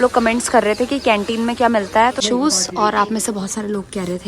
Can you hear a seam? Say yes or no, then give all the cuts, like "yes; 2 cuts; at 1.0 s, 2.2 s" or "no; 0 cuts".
yes; 1 cut; at 2.2 s